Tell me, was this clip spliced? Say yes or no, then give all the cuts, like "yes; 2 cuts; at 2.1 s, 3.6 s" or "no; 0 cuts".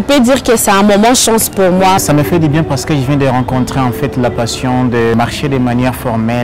yes; 2 cuts; at 2.0 s, 5.1 s